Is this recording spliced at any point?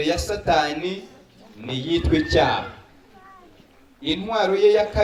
no; 0 cuts

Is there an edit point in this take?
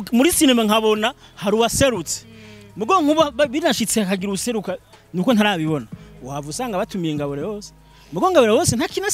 no; 0 cuts

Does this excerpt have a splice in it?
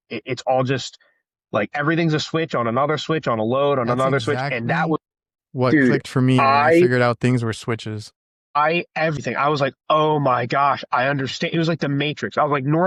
no; 0 cuts

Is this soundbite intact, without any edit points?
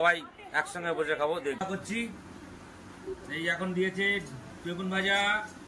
no; 1 cut; at 1.6 s

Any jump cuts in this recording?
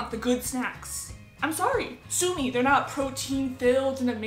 no; 0 cuts

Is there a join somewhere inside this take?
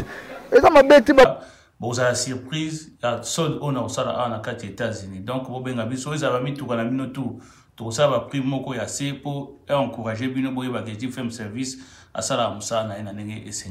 yes; 1 cut; at 1.3 s

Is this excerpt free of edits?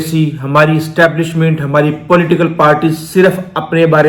yes; 0 cuts

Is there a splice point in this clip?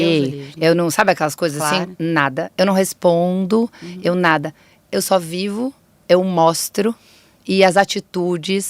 no; 0 cuts

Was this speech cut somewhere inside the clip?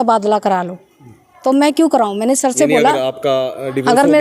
no; 0 cuts

